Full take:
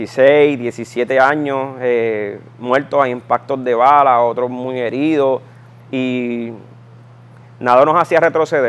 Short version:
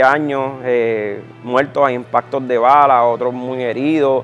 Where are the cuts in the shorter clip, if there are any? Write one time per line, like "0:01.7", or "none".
none

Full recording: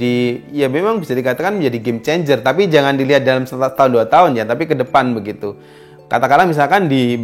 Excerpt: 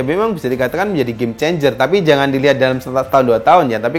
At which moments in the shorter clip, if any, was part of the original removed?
none

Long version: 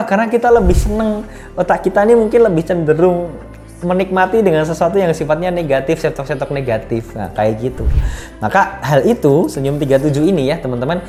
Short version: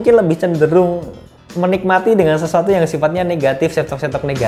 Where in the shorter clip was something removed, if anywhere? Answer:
none

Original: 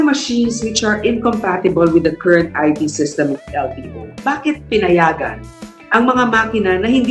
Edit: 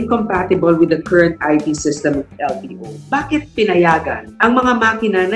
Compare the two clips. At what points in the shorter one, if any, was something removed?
0:04.2

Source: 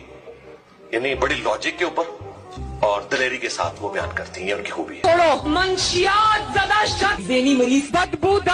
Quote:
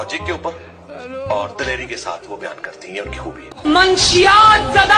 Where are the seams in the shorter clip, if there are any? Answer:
0:03.6

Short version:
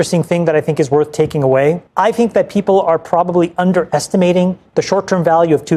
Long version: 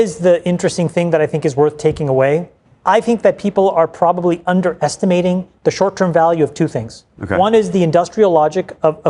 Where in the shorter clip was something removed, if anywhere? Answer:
0:01.9

